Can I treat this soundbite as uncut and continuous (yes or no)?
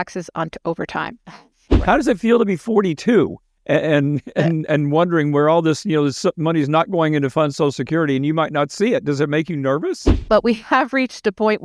no